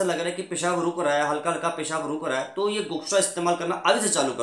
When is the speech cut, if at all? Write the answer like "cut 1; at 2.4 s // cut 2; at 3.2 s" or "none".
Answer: none